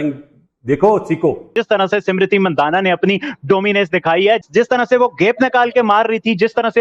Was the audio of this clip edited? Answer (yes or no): yes